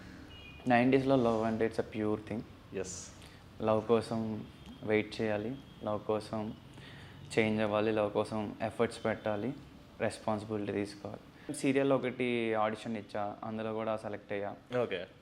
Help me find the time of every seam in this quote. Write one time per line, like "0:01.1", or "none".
0:11.5